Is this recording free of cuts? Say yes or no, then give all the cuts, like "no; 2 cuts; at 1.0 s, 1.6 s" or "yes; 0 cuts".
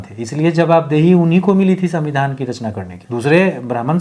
no; 1 cut; at 2.9 s